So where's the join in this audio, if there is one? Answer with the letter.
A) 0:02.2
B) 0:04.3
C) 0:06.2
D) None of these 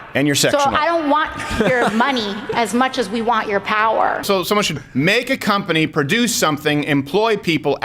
B